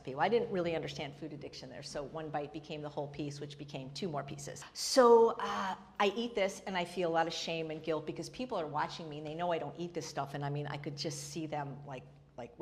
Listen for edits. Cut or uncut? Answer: uncut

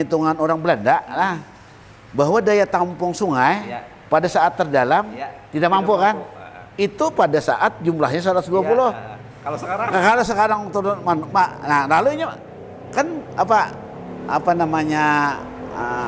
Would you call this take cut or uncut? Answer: uncut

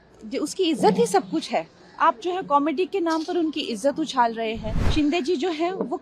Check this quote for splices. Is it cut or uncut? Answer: cut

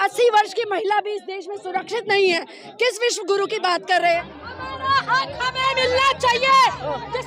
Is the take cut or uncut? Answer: cut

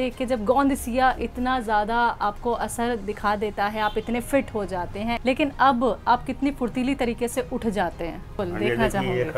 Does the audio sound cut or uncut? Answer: cut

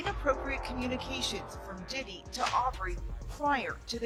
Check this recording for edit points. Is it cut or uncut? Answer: uncut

